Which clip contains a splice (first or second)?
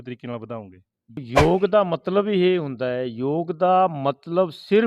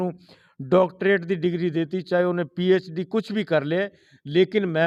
first